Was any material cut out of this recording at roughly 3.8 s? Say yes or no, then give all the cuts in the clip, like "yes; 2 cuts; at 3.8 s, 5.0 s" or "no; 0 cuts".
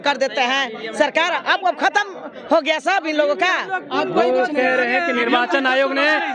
no; 0 cuts